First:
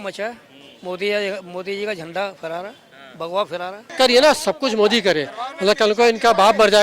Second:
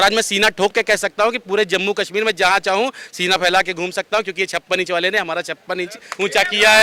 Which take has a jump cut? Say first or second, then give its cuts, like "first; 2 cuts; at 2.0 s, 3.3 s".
first; 1 cut; at 3.9 s